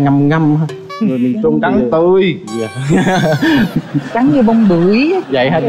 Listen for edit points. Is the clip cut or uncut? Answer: uncut